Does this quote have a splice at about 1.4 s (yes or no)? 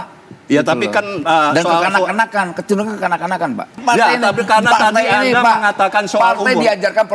no